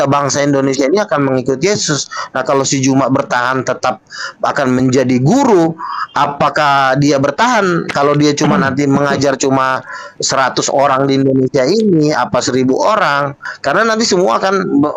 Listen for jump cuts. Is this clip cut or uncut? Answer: uncut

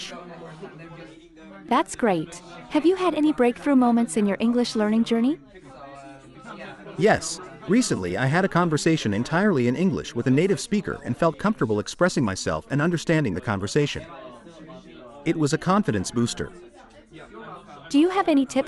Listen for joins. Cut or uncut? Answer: uncut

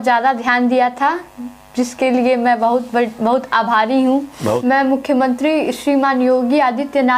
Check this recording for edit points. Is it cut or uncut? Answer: cut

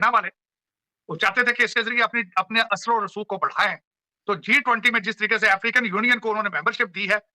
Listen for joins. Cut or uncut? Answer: uncut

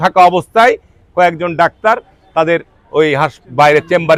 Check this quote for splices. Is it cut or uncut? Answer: uncut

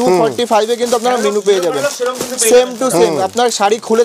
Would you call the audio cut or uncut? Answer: uncut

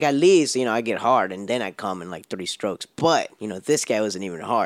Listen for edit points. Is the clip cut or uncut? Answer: uncut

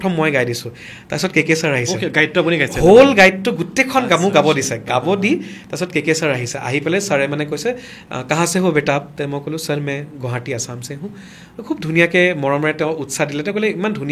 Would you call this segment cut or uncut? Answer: uncut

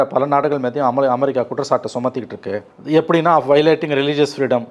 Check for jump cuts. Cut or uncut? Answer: uncut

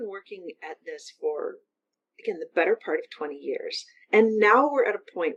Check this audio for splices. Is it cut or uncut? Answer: uncut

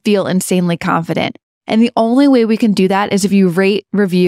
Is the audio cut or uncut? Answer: uncut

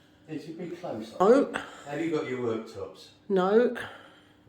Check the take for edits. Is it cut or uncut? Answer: cut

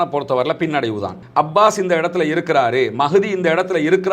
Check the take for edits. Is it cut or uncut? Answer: cut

